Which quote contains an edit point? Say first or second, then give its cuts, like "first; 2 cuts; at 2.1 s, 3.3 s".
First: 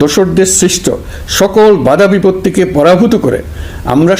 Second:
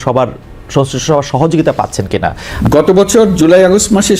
second; 1 cut; at 2.5 s